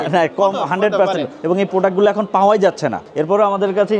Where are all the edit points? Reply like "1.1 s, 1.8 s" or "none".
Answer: 1.3 s, 3.1 s